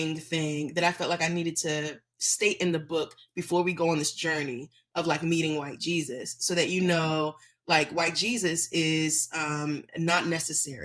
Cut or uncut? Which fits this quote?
uncut